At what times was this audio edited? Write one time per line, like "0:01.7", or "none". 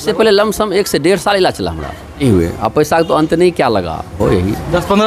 0:02.2
0:04.2